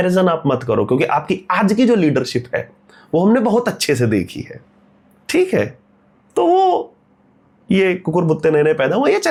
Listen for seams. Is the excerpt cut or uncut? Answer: uncut